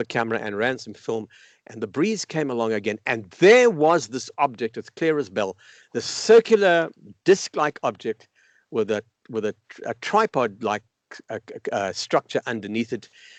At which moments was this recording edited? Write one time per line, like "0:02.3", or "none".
none